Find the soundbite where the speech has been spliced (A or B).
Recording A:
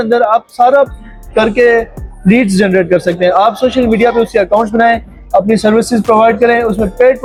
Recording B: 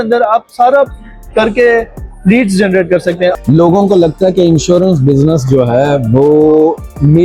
B